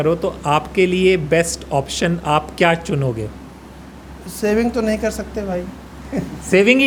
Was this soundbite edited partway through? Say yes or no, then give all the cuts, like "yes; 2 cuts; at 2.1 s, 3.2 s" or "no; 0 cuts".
no; 0 cuts